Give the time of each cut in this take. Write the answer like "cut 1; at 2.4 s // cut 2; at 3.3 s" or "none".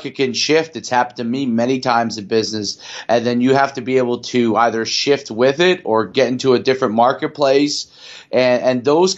none